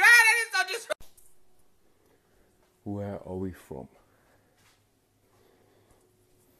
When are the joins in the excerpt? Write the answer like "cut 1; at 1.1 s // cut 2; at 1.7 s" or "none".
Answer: cut 1; at 0.9 s